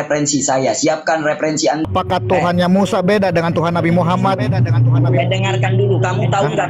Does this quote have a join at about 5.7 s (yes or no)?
no